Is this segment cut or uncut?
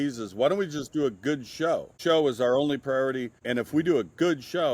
cut